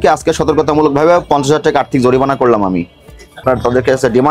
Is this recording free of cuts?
no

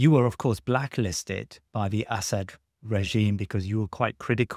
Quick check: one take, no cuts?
yes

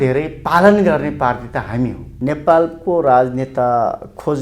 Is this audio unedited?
no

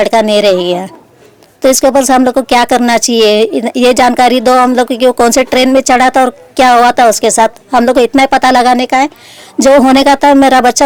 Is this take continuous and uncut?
yes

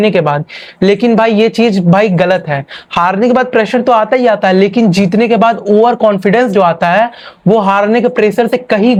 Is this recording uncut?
yes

